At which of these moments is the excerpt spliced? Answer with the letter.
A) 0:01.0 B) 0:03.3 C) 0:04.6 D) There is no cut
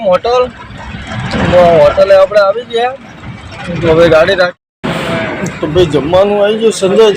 C